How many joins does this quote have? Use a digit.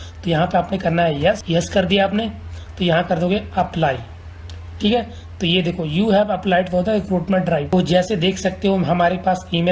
2